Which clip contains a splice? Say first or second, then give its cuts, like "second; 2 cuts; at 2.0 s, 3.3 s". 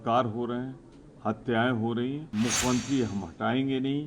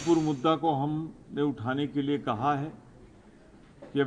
first; 1 cut; at 2.2 s